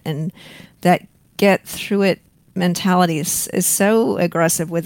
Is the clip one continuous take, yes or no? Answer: yes